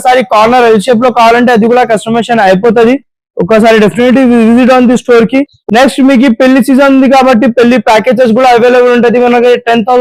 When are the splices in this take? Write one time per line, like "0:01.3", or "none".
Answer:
none